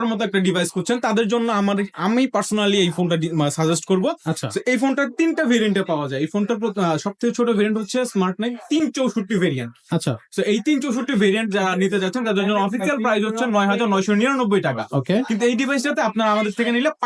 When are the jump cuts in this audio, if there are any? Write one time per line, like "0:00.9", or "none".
none